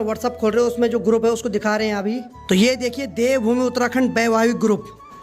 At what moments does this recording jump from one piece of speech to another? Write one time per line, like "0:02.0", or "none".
none